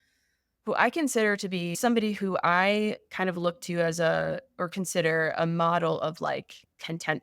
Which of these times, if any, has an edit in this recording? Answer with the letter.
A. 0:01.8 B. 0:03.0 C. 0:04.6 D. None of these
A